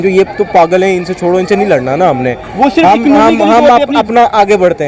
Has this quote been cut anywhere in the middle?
no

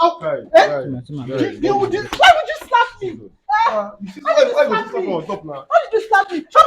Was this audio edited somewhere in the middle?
no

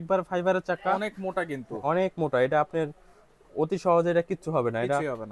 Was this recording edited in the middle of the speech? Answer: no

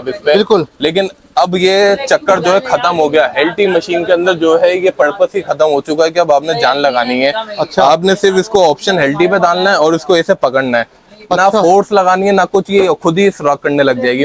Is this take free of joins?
yes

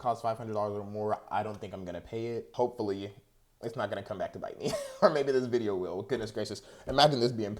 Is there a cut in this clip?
yes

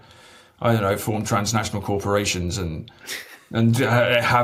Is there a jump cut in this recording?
no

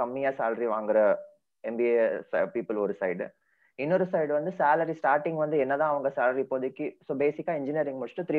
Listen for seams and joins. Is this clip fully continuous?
yes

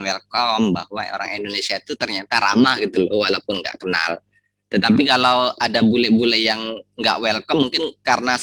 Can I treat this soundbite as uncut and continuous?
yes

